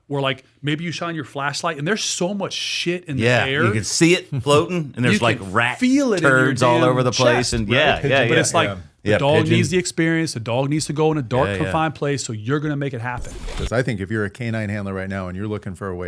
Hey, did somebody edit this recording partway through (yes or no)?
yes